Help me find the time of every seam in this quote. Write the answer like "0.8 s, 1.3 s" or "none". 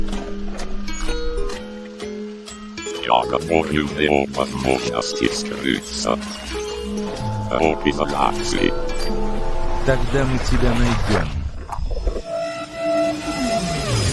none

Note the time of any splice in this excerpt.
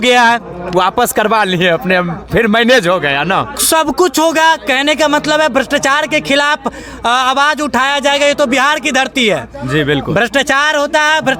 none

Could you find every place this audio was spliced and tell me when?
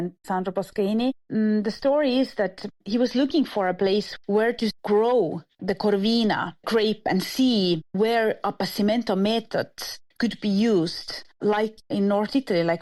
none

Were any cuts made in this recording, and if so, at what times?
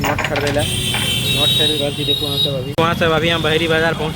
2.7 s

